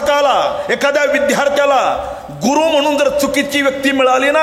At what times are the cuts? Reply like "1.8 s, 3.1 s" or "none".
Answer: none

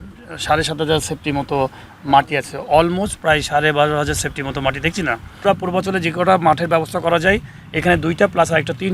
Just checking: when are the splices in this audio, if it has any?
5.3 s

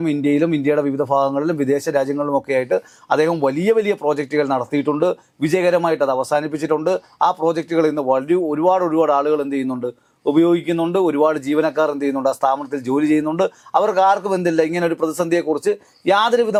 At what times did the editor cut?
none

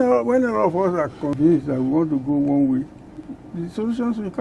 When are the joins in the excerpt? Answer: 1.3 s, 3.4 s

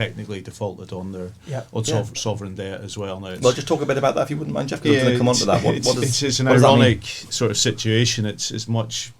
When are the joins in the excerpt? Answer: none

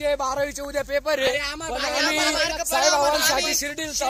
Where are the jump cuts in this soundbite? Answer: none

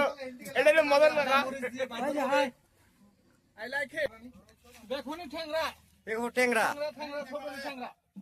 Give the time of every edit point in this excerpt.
4.1 s

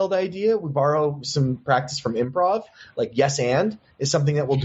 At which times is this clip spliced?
1.6 s

